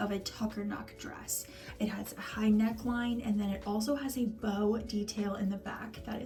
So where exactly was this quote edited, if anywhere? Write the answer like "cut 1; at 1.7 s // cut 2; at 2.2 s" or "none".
none